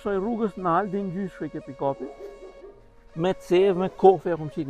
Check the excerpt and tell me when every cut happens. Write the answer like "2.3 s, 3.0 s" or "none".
none

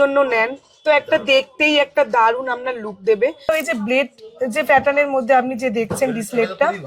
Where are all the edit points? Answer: 3.5 s

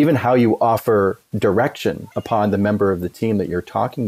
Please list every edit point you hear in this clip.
2.1 s

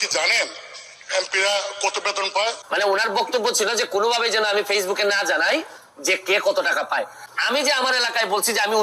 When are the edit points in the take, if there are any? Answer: 2.6 s, 7.2 s

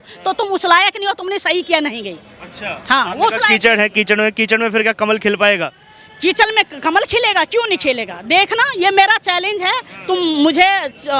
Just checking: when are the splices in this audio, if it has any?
none

